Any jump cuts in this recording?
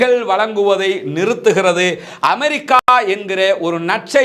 no; 0 cuts

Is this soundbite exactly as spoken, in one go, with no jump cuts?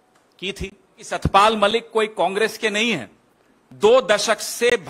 no; 1 cut; at 1.0 s

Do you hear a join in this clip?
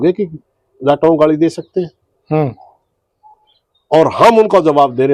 no; 0 cuts

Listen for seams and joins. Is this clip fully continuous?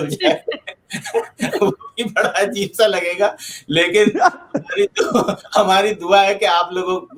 yes; 0 cuts

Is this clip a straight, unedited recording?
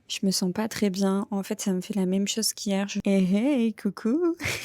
no; 1 cut; at 3.0 s

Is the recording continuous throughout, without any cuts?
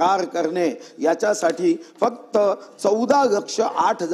yes; 0 cuts

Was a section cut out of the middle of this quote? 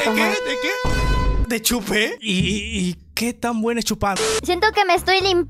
yes; 1 cut; at 4.4 s

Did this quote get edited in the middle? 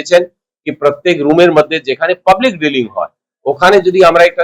no; 0 cuts

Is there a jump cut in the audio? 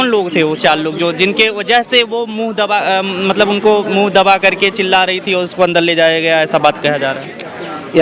no; 0 cuts

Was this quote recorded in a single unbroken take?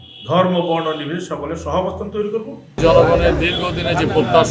no; 1 cut; at 2.6 s

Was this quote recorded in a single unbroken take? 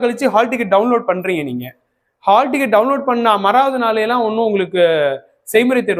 yes; 0 cuts

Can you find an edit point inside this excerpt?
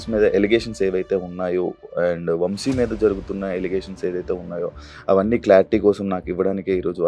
no; 0 cuts

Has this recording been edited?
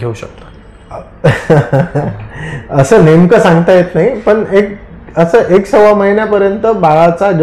no; 0 cuts

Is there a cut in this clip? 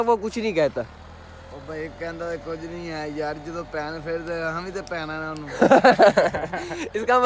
no; 0 cuts

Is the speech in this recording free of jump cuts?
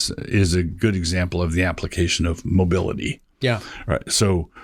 yes; 0 cuts

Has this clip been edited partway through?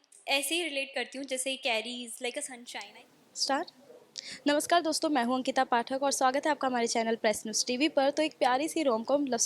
no; 0 cuts

